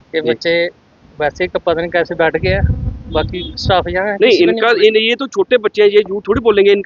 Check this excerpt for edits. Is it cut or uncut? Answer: uncut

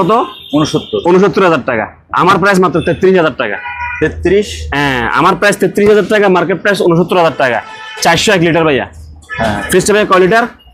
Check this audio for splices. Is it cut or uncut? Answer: uncut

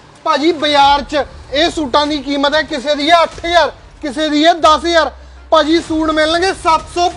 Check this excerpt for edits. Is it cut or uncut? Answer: uncut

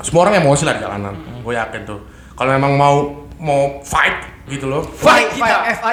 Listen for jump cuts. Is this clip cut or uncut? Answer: uncut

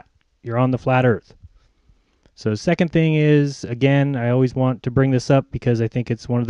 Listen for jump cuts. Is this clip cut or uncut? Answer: uncut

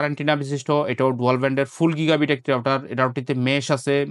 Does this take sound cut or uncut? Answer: uncut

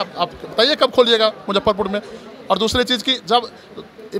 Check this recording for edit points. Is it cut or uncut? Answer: uncut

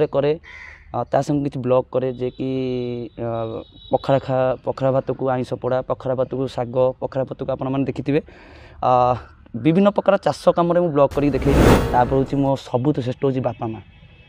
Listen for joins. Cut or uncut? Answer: cut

